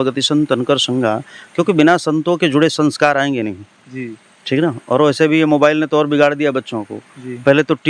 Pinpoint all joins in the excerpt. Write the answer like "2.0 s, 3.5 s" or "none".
none